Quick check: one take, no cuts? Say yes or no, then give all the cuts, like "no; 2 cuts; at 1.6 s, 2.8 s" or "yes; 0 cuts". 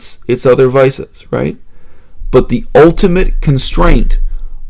yes; 0 cuts